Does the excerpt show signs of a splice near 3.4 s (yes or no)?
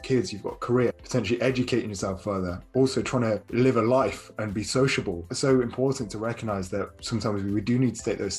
yes